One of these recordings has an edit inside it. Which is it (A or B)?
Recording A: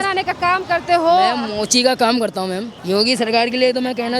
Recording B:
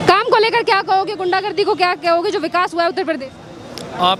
A